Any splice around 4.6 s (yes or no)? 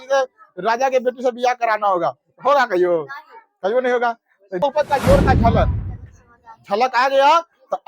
yes